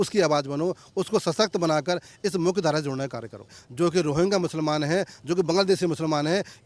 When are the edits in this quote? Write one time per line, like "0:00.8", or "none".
0:03.6